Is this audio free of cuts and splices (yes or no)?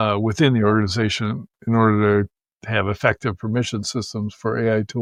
yes